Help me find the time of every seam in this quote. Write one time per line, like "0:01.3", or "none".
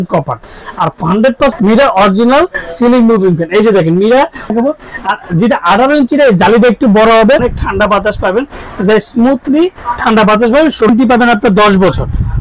0:01.5
0:04.5
0:07.5
0:10.9